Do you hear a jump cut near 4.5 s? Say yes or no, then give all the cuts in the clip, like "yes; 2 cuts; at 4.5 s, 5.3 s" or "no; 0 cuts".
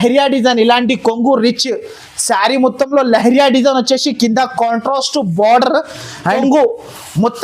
no; 1 cut; at 6.4 s